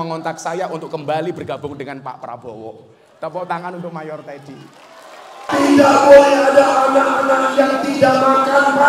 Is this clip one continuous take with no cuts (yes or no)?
no